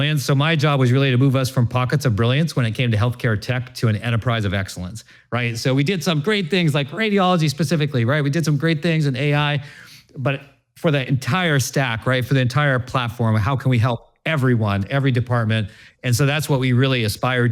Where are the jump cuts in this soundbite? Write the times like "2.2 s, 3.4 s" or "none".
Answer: none